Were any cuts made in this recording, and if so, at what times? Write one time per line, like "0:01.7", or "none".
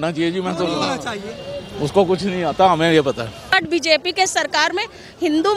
0:03.6